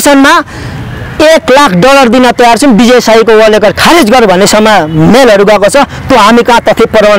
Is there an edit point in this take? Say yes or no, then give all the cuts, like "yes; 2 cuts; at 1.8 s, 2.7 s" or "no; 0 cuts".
no; 0 cuts